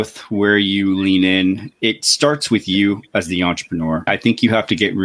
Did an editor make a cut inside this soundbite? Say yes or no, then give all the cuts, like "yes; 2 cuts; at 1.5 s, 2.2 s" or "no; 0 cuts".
no; 0 cuts